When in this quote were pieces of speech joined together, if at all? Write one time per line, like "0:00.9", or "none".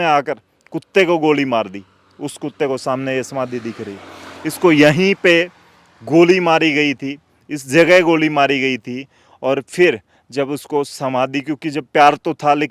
none